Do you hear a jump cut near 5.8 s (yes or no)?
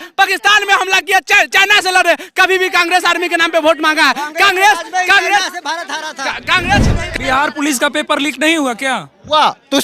no